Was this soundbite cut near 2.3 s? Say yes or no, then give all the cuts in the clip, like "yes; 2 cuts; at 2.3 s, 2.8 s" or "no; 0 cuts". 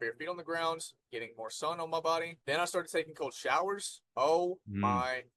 yes; 2 cuts; at 2.3 s, 4.0 s